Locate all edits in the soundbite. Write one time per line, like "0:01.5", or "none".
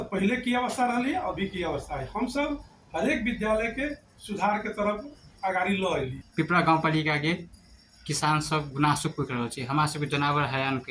0:06.2